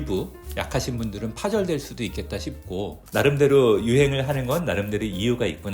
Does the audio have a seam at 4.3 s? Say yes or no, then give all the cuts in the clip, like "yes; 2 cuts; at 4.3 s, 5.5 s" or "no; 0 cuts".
no; 1 cut; at 3.0 s